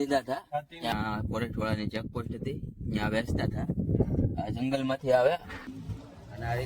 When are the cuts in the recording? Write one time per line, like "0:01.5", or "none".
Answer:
0:00.9
0:05.6